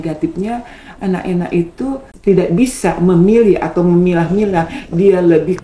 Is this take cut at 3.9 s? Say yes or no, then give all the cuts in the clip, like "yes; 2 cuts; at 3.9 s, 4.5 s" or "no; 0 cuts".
no; 1 cut; at 2.1 s